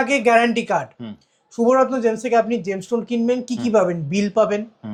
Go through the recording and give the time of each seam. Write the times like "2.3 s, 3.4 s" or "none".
none

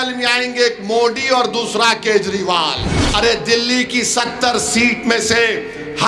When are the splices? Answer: 2.9 s

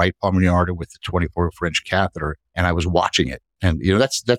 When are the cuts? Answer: 2.4 s

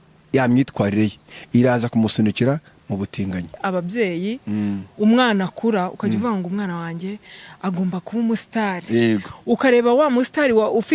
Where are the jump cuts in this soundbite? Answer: 3.6 s

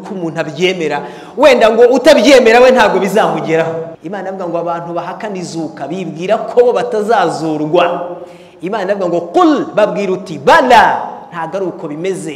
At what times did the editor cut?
4.0 s

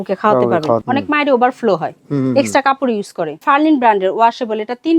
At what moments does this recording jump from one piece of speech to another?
0.8 s, 3.4 s

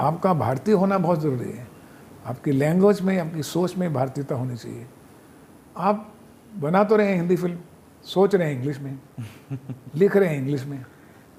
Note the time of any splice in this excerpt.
none

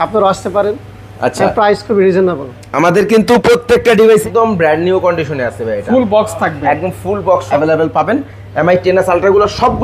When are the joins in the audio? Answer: 4.2 s, 7.5 s

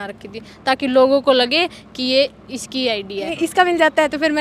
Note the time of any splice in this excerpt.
3.3 s

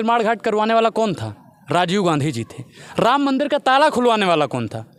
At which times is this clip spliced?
none

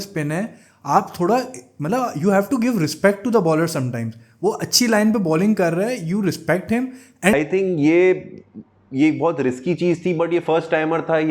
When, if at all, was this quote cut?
7.3 s

